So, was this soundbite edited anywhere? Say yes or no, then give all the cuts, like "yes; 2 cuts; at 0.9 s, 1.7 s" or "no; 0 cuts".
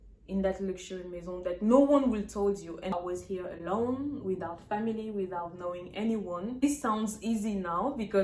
yes; 2 cuts; at 2.9 s, 6.6 s